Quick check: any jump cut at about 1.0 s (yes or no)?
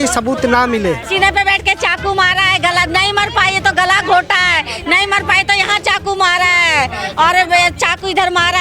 yes